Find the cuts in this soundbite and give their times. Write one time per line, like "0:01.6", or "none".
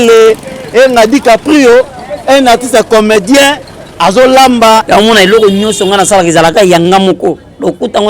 0:04.8